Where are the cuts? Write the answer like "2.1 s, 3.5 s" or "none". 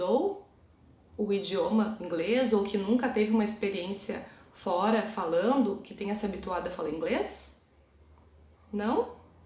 7.8 s